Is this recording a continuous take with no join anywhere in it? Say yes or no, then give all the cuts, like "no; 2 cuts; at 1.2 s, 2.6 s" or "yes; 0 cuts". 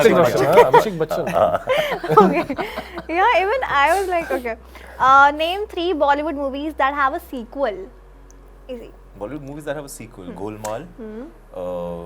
yes; 0 cuts